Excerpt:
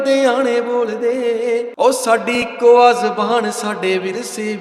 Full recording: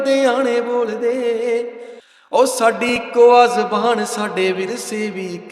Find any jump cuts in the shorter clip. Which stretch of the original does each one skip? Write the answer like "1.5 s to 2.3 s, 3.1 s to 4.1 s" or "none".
1.7 s to 2.2 s